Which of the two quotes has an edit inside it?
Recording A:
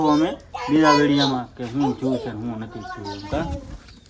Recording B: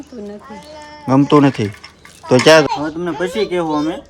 B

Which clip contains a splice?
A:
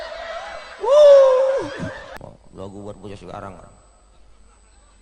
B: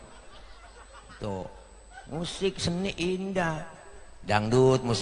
A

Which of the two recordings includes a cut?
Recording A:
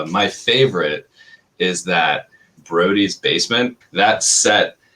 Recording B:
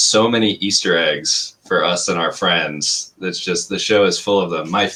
A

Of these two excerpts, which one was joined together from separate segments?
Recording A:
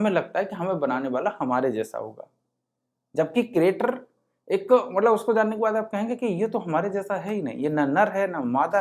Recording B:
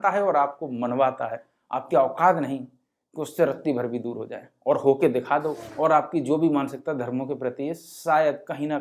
B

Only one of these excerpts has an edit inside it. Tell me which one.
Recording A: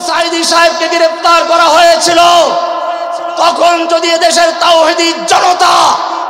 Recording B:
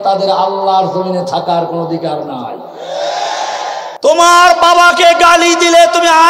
B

